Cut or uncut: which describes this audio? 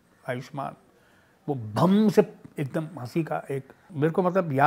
cut